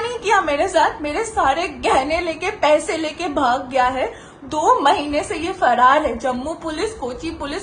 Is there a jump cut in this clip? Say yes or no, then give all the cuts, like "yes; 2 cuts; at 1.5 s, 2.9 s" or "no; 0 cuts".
no; 0 cuts